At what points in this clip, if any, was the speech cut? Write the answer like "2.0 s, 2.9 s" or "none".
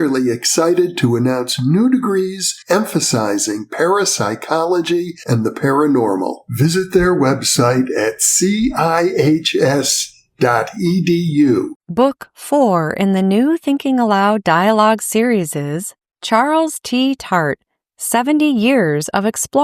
11.8 s

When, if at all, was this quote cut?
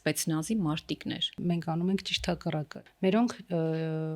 1.4 s, 2.8 s

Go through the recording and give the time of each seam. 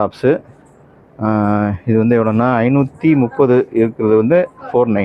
none

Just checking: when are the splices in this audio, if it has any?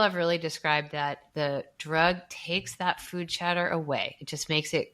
1.2 s

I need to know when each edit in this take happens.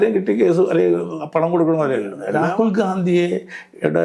2.2 s

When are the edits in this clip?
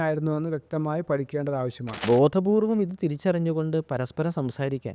1.9 s

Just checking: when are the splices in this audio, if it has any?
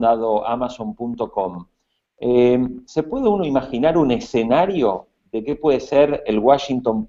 none

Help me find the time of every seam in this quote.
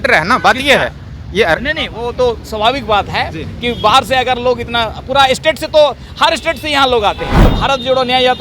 7.5 s

